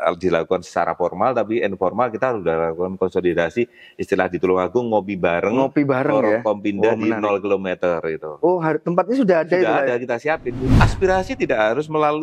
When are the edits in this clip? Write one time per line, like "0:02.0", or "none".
0:10.6

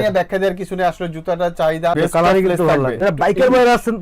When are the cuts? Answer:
0:02.0
0:03.0

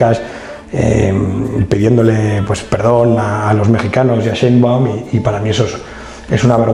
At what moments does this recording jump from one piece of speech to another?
none

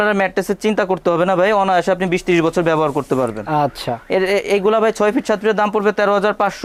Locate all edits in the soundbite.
none

